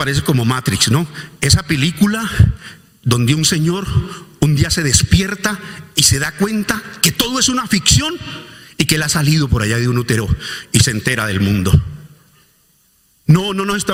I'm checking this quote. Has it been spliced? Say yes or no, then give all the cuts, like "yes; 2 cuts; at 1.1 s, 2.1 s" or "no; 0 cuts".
no; 0 cuts